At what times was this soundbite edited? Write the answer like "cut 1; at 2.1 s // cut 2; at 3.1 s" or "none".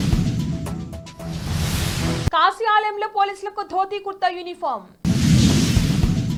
none